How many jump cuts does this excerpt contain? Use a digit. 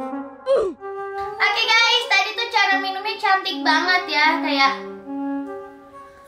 0